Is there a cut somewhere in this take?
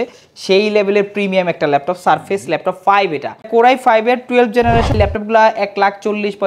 yes; 2 cuts; at 3.5 s, 5.0 s

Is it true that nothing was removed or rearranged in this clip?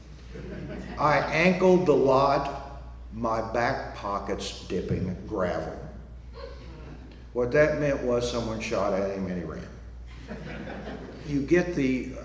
no; 1 cut; at 11.2 s

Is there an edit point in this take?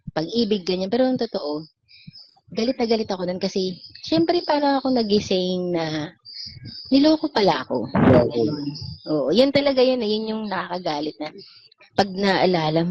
no; 0 cuts

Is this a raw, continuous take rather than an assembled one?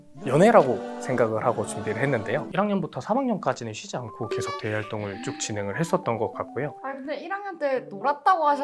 no; 1 cut; at 2.5 s

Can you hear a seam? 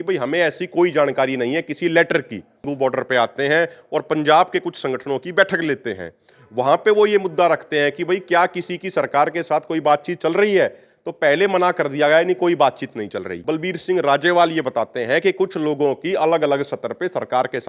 yes; 2 cuts; at 2.6 s, 13.3 s

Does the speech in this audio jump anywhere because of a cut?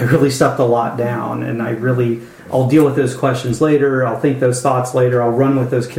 yes; 1 cut; at 2.3 s

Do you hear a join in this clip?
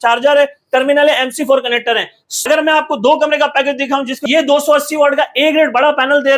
yes; 2 cuts; at 2.3 s, 4.2 s

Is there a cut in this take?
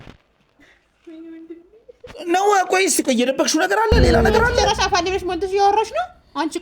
yes; 1 cut; at 4.3 s

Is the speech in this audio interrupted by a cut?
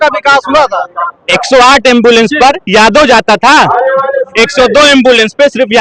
no; 0 cuts

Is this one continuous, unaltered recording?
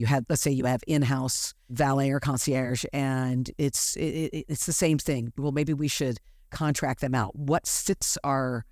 no; 1 cut; at 1.7 s

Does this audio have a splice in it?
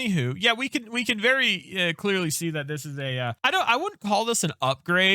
yes; 1 cut; at 3.3 s

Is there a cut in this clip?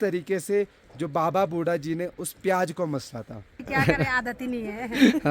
yes; 1 cut; at 3.6 s

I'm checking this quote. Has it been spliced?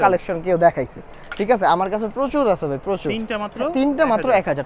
no; 0 cuts

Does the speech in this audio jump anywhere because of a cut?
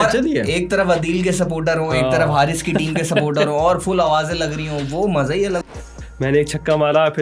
yes; 1 cut; at 5.7 s

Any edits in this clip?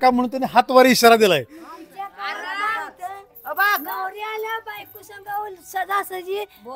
no; 0 cuts

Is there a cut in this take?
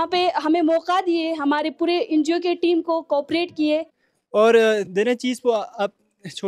yes; 1 cut; at 4.0 s

